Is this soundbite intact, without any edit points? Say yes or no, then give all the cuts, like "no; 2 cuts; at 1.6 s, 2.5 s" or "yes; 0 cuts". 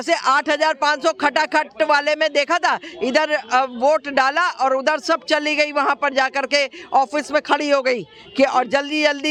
yes; 0 cuts